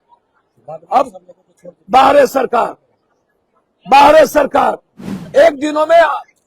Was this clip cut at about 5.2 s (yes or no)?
yes